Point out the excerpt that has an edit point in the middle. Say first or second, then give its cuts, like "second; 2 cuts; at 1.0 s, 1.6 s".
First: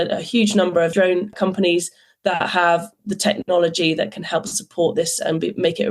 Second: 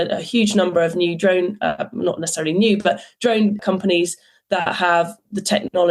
first; 1 cut; at 1.2 s